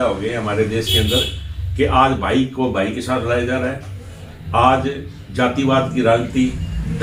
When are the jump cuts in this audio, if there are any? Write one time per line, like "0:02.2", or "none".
none